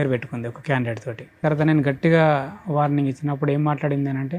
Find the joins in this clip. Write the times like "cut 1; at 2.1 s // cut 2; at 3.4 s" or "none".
cut 1; at 1.4 s